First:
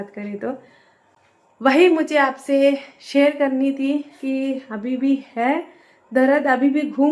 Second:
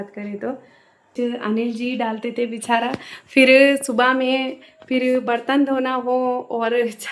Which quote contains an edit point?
second; 1 cut; at 1.0 s

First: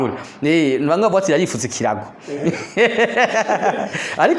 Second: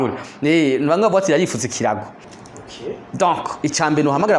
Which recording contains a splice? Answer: second; 1 cut; at 2.3 s

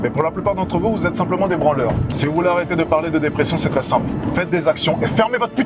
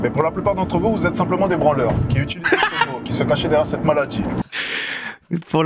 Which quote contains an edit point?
first; 1 cut; at 2.1 s

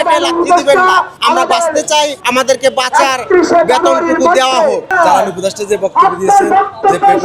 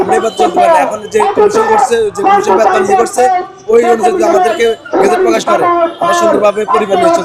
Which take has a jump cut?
first; 3 cuts; at 1.1 s, 2.2 s, 4.9 s

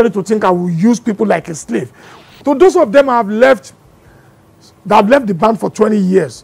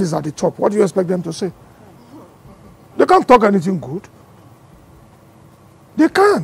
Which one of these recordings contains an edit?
first; 1 cut; at 2.1 s

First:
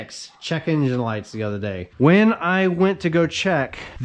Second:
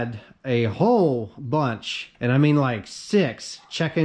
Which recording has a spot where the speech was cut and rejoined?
first; 1 cut; at 1.9 s

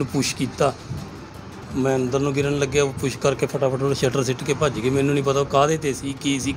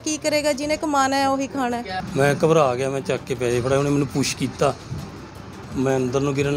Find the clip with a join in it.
second; 1 cut; at 2.0 s

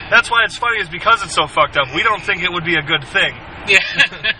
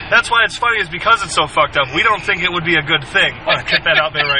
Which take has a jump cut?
second; 1 cut; at 3.4 s

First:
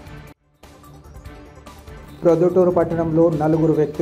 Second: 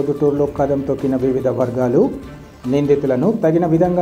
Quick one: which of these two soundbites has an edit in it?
first; 1 cut; at 2.0 s

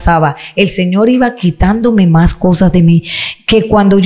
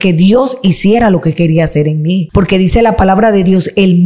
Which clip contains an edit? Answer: second; 1 cut; at 2.3 s

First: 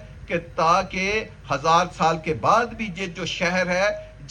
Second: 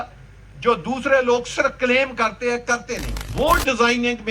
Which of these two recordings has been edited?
second; 1 cut; at 3.2 s

